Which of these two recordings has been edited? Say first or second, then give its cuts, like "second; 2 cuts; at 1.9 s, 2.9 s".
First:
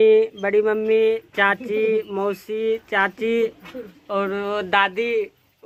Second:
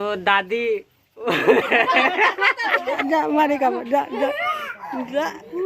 second; 1 cut; at 3.0 s